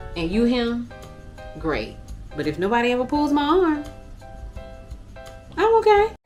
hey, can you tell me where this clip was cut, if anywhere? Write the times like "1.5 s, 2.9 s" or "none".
none